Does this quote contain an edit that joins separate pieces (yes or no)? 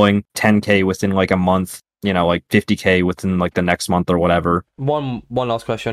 yes